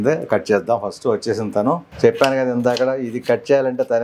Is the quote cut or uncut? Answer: cut